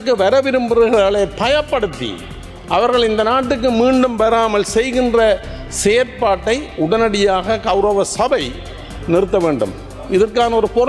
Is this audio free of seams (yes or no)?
yes